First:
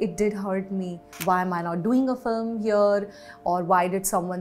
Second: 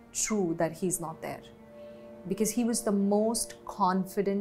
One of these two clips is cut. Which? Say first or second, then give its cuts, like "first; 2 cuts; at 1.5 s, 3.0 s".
first; 1 cut; at 1.1 s